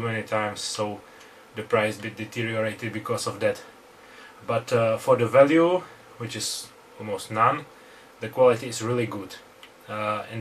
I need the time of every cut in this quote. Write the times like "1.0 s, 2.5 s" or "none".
none